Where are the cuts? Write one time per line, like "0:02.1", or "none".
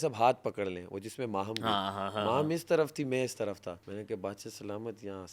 0:03.8